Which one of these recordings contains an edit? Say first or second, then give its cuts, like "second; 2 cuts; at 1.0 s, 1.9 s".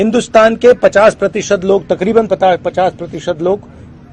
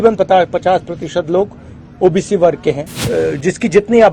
second; 1 cut; at 2.9 s